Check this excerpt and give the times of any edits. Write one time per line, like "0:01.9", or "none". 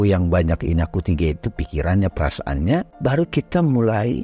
0:02.9